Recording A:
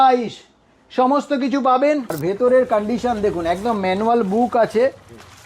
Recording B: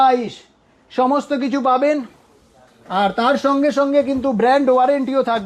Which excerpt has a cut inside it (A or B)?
A